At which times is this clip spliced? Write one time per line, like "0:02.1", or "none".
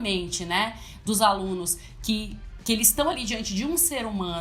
none